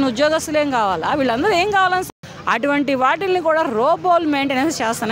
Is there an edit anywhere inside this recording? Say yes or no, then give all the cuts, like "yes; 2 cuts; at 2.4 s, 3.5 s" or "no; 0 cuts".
yes; 1 cut; at 2.1 s